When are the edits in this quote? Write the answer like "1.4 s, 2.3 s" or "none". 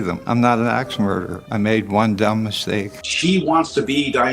3.0 s